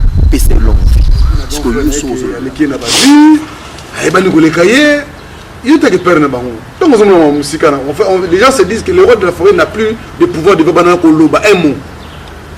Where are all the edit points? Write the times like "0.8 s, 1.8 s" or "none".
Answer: 2.3 s